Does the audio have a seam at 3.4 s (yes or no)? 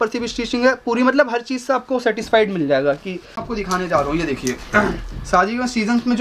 yes